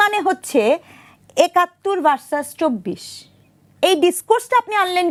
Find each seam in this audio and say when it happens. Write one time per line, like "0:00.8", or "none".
none